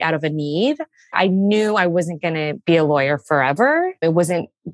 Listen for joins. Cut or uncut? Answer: cut